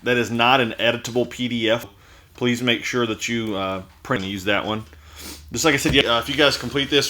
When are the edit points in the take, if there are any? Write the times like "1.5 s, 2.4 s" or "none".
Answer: 2.0 s, 4.2 s, 6.0 s